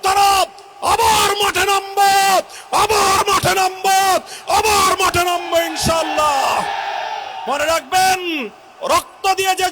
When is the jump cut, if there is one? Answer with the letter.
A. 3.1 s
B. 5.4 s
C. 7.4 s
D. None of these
C